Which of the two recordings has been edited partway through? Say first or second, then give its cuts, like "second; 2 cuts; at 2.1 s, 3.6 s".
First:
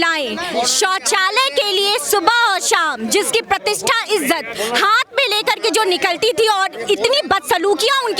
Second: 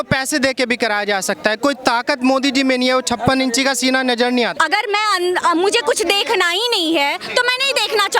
second; 1 cut; at 4.5 s